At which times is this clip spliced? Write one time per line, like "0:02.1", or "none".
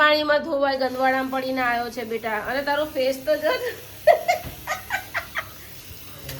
none